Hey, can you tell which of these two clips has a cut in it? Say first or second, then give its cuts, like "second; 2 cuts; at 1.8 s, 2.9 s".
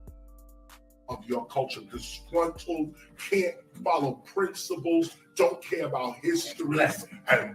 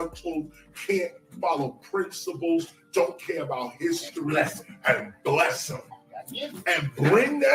first; 1 cut; at 1.1 s